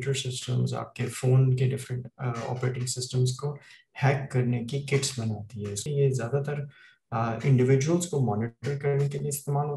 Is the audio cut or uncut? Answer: cut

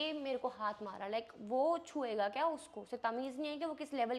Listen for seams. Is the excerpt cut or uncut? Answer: uncut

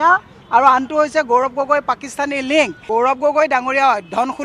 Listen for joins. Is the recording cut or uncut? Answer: cut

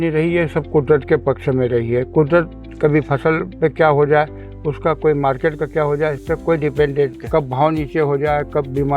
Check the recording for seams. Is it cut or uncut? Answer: cut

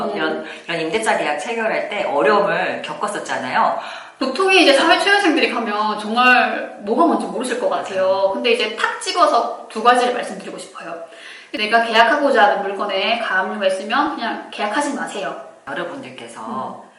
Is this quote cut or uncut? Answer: cut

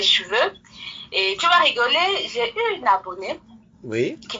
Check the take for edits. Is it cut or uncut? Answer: uncut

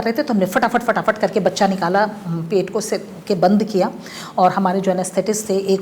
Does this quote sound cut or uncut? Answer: uncut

